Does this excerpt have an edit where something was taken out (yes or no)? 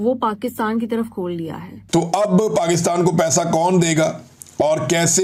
no